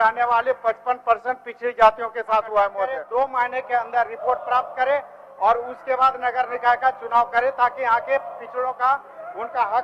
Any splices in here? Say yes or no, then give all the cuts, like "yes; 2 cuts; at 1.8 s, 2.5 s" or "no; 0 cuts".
yes; 1 cut; at 2.9 s